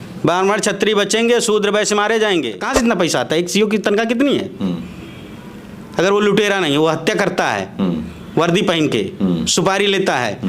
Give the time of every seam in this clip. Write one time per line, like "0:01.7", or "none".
0:02.6